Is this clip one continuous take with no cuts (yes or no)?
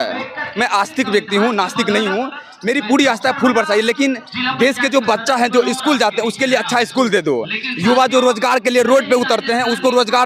yes